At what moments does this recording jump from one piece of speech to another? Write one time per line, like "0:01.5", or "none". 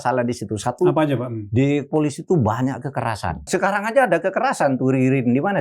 0:03.4